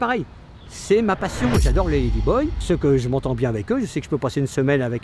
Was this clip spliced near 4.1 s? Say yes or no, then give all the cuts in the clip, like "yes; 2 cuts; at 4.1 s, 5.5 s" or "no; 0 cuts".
no; 1 cut; at 2.6 s